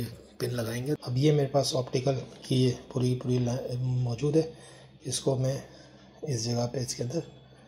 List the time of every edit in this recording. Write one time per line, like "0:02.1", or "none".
0:01.0